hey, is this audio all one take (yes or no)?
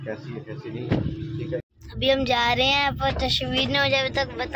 no